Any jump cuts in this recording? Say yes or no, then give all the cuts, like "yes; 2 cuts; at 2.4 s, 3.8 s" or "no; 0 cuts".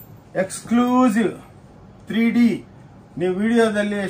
no; 0 cuts